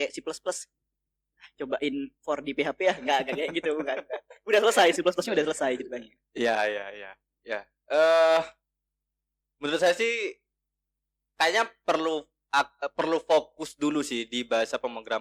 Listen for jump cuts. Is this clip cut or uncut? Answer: uncut